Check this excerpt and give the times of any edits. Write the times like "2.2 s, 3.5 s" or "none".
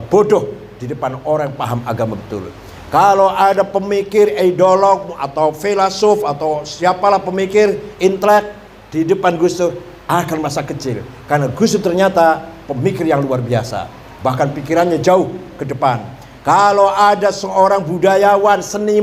none